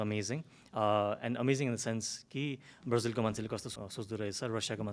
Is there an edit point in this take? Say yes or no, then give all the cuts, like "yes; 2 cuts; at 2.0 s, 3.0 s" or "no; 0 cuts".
yes; 1 cut; at 3.7 s